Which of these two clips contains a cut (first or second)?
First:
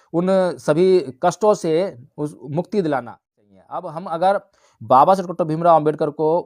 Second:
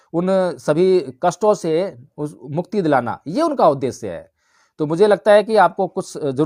first